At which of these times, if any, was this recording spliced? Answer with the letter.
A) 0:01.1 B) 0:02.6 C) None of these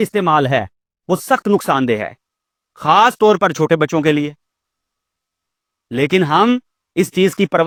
C